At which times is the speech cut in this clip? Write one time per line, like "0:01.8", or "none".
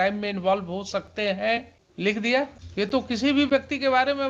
0:01.8
0:02.6